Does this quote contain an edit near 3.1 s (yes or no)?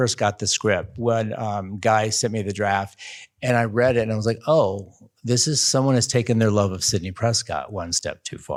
no